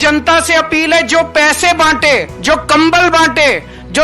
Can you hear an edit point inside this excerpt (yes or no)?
yes